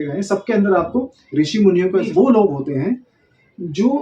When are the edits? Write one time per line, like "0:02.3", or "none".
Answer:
0:02.1

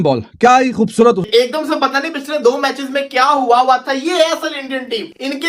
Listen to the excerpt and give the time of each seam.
0:01.2

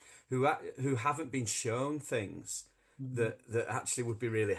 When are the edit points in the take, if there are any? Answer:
none

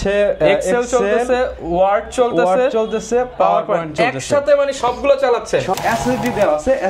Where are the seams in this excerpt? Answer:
0:05.7

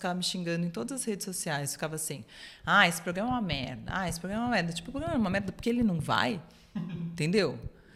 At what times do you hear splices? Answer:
none

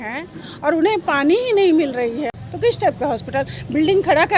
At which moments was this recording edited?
0:02.3

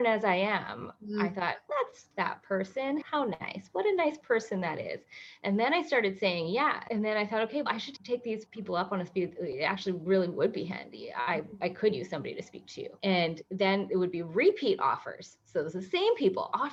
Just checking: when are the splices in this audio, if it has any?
none

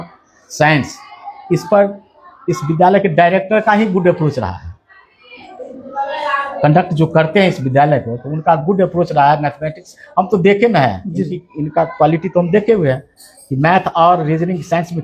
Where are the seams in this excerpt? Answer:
none

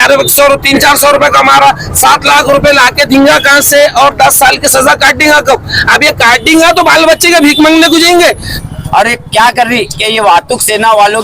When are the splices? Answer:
0:08.5

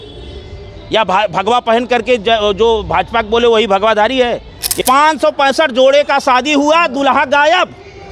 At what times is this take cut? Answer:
0:04.8

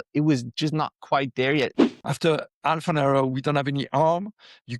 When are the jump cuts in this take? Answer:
0:01.7

